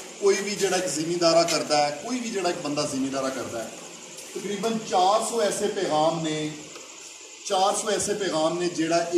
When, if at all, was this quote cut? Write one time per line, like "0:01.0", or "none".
none